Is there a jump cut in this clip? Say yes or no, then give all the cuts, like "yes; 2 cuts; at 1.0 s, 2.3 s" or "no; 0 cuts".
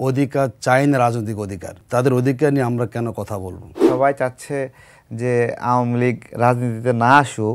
yes; 2 cuts; at 1.8 s, 3.8 s